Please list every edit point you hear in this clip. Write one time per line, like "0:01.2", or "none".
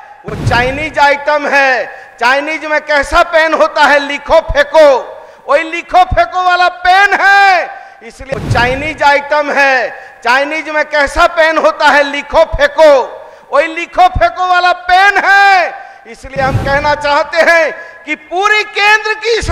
0:08.1